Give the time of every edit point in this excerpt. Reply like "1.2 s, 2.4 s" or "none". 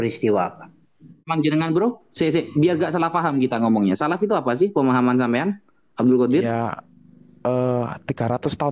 1.3 s